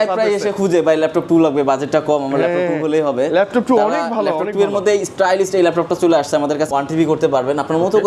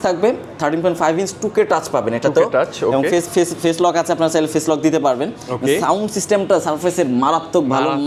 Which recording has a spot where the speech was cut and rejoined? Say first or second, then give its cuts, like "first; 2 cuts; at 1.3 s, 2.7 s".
first; 1 cut; at 6.7 s